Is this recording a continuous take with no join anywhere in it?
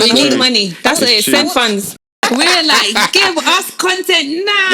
no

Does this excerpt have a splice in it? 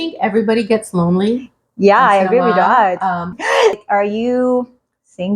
yes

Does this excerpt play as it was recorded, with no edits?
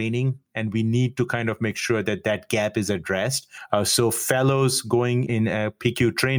yes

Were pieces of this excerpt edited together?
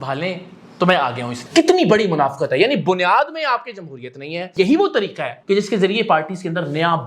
yes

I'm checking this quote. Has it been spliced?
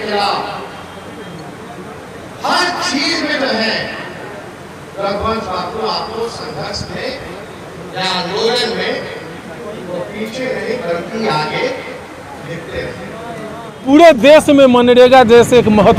yes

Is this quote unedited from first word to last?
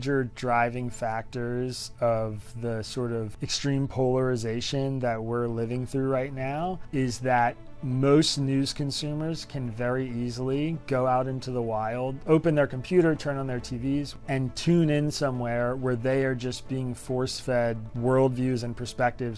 no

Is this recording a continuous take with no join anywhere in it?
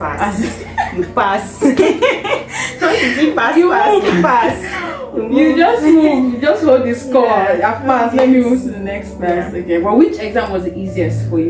yes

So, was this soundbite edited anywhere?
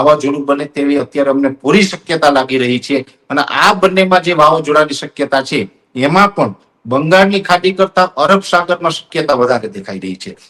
no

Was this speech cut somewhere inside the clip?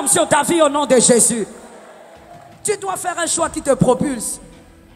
no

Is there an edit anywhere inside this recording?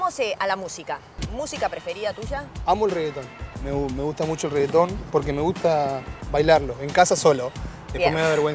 yes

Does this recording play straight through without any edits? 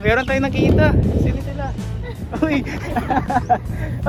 yes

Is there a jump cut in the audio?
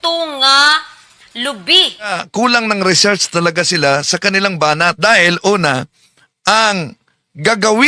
yes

